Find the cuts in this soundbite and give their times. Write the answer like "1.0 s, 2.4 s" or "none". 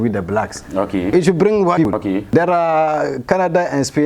1.1 s, 1.9 s